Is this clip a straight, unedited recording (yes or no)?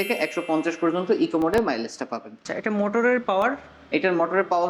no